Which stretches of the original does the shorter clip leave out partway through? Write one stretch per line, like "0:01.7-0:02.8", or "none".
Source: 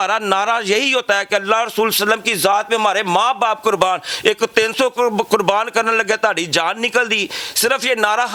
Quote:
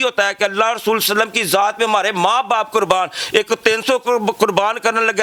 none

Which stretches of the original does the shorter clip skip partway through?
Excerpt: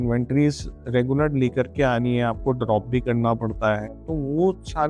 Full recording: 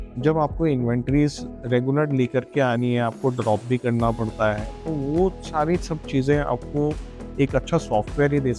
none

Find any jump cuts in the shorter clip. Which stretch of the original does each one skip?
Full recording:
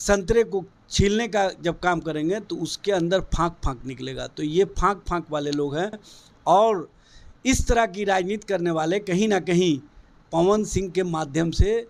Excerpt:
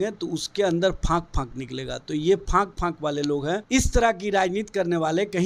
0:05.9-0:07.4

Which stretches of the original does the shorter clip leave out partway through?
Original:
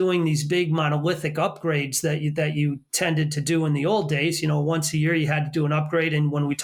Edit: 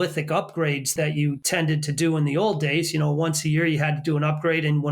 0:02.3-0:02.8

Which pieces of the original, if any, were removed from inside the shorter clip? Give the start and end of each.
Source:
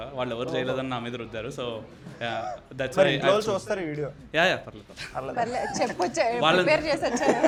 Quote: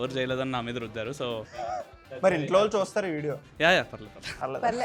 0:02.0-0:02.3

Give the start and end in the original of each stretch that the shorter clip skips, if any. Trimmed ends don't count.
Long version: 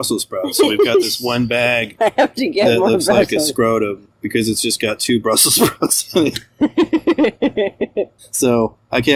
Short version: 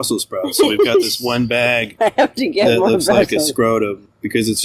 none

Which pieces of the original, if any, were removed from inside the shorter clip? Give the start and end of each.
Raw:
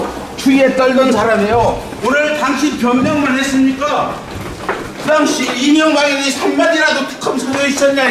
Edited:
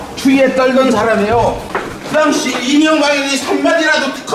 0:01.9-0:04.6

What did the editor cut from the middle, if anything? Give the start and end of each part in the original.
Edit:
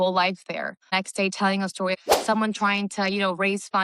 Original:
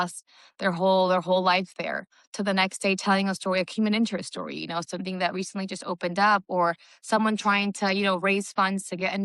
0:02.2-0:02.6
0:03.7-0:06.9

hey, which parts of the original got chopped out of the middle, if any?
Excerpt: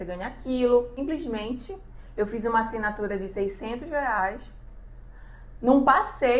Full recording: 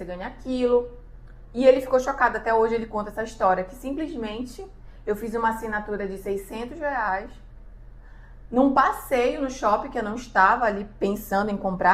0:01.0-0:03.8

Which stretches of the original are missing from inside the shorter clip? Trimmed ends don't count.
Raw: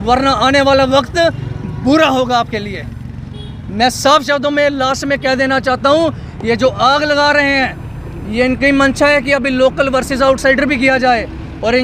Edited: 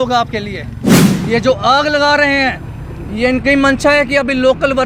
0:03.3-0:06.3

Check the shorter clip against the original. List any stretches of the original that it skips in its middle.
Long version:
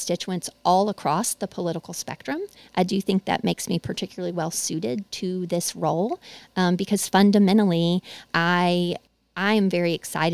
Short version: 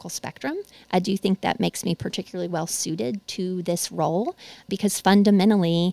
0:06.5-0:06.8

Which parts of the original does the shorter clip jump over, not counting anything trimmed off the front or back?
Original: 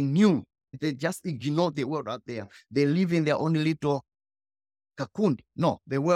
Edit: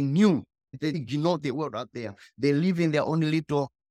0:01.0-0:01.3

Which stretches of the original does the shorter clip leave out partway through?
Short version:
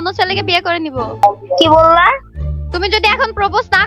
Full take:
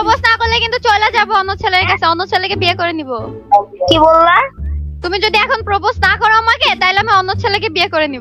0:03.4-0:03.5

